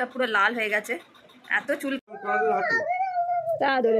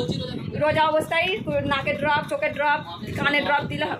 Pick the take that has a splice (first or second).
first